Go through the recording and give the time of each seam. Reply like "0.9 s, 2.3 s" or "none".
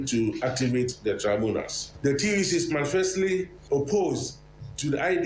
1.8 s, 3.6 s